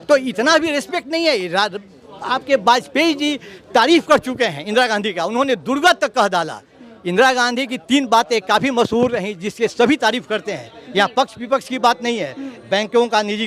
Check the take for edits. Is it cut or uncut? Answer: uncut